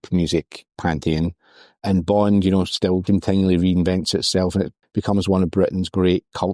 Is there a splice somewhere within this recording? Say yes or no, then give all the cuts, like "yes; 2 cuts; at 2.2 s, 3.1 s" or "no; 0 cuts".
yes; 2 cuts; at 3.0 s, 4.8 s